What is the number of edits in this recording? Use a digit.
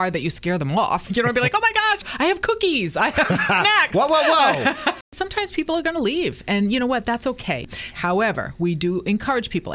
2